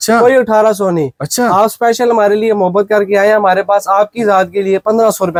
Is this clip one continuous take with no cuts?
yes; 0 cuts

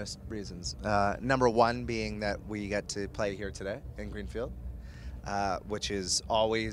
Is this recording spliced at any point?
yes; 1 cut; at 3.6 s

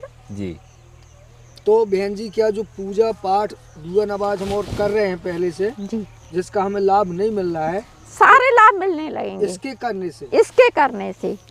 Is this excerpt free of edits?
yes; 0 cuts

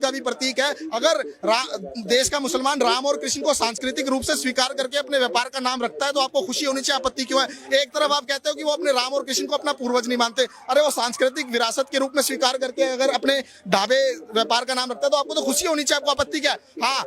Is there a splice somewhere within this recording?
no; 0 cuts

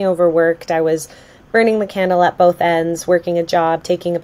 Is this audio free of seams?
yes; 0 cuts

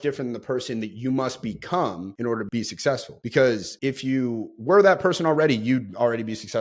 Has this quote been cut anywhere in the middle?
no; 0 cuts

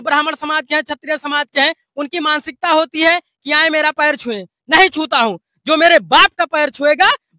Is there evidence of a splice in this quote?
no; 0 cuts

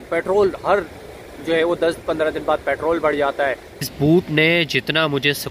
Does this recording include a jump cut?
yes; 1 cut; at 3.8 s

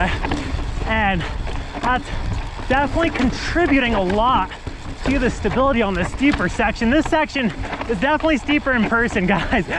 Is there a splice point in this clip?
no; 0 cuts

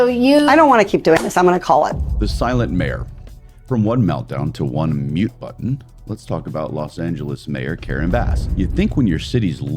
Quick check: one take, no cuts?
no; 2 cuts; at 2.1 s, 8.4 s

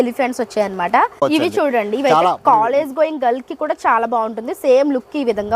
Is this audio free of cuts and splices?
no; 1 cut; at 1.1 s

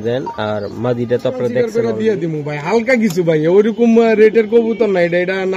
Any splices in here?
yes; 1 cut; at 1.7 s

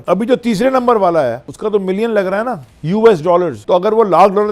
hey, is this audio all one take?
no; 3 cuts; at 1.5 s, 2.7 s, 3.6 s

